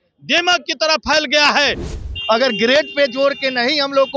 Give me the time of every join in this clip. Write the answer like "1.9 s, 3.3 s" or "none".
1.9 s